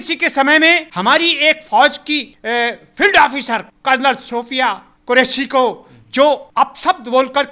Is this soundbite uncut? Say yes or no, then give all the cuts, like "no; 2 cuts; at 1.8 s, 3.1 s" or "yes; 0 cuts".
no; 5 cuts; at 0.9 s, 2.3 s, 3.7 s, 4.9 s, 6.5 s